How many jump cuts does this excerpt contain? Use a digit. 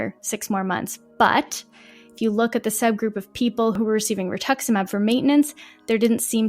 1